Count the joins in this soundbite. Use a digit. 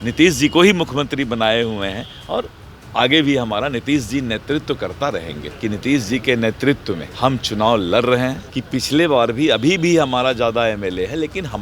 3